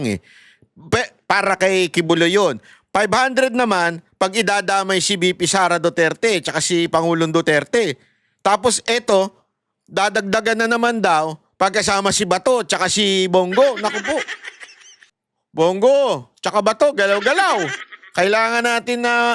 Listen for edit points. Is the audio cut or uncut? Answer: uncut